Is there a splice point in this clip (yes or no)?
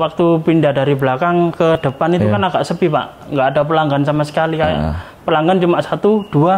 no